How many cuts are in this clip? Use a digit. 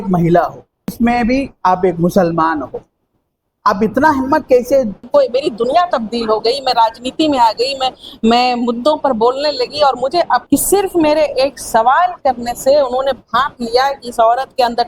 3